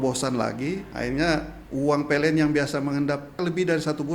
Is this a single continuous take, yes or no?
no